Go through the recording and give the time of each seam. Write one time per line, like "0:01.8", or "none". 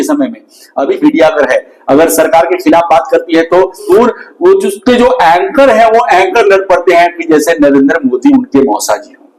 0:01.0
0:03.9